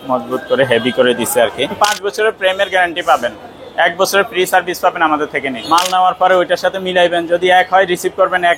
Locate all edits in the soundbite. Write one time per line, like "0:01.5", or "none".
0:01.8
0:05.6